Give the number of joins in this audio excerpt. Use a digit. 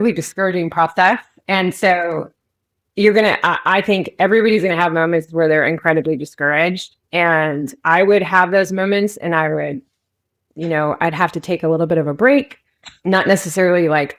0